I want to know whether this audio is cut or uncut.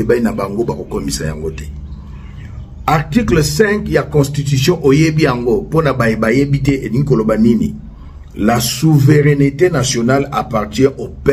uncut